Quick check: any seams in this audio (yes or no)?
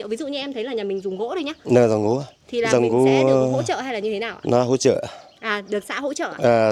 no